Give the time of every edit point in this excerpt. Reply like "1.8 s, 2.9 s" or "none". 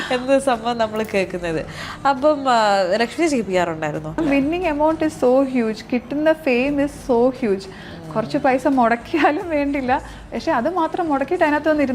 4.2 s

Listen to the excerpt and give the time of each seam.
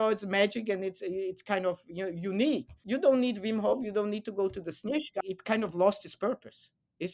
2.7 s, 5.1 s

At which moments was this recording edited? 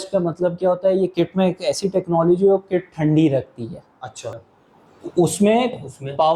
4.3 s

